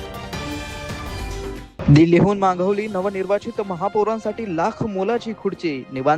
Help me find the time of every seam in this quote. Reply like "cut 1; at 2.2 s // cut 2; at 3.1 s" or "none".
cut 1; at 1.5 s

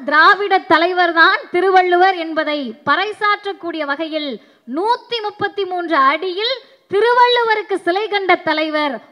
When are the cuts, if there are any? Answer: none

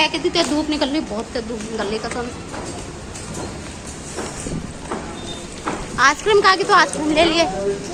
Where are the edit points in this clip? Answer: none

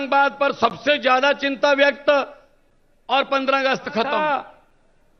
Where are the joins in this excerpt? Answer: cut 1; at 4.2 s

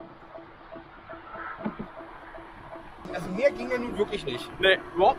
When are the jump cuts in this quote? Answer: none

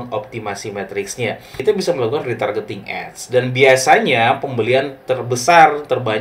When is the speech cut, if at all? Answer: cut 1; at 1.6 s

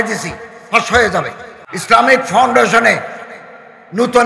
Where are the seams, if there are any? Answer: cut 1; at 1.7 s

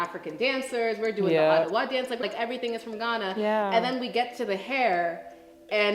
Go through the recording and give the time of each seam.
cut 1; at 2.2 s

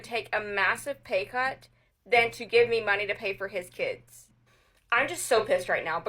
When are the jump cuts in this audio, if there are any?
none

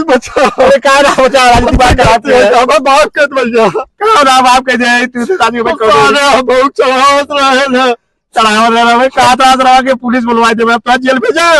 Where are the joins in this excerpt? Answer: none

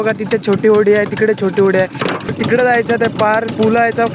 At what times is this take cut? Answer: cut 1; at 2.3 s

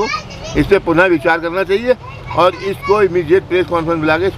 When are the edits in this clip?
none

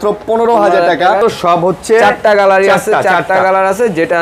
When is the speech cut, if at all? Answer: cut 1; at 1.2 s

